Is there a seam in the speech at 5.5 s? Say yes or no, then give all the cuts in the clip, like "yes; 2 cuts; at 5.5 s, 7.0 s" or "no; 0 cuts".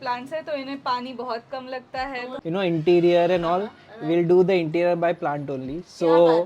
no; 1 cut; at 2.3 s